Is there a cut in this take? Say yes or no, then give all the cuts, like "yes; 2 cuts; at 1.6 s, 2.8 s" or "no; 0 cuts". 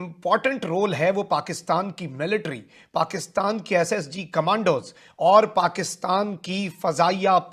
no; 0 cuts